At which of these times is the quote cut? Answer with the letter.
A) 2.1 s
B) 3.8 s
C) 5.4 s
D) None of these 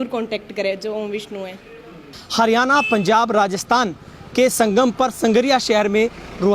A